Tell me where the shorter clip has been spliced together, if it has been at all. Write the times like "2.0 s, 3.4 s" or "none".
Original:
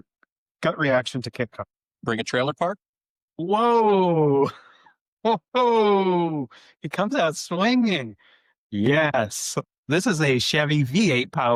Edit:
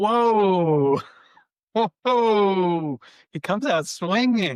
none